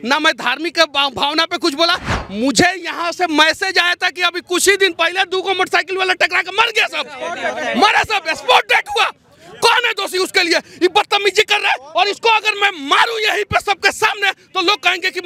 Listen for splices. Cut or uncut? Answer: uncut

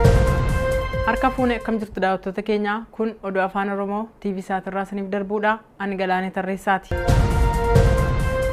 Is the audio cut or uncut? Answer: uncut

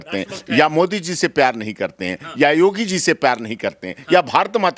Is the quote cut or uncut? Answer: uncut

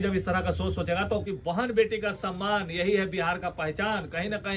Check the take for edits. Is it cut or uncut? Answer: cut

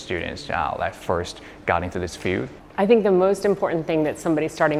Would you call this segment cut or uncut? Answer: uncut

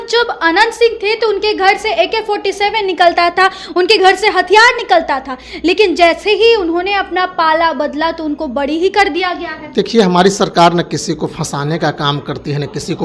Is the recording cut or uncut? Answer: uncut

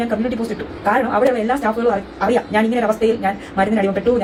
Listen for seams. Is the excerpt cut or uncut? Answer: uncut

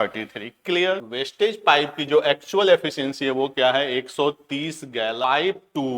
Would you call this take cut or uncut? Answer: cut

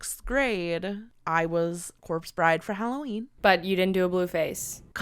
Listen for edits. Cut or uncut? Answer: cut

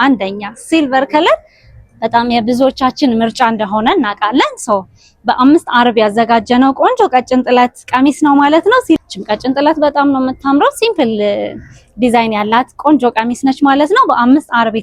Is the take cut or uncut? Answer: cut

